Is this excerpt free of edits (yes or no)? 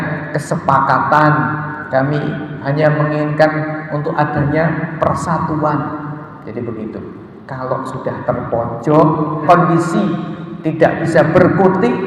no